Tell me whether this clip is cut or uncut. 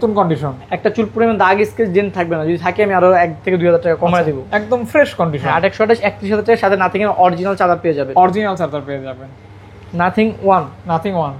uncut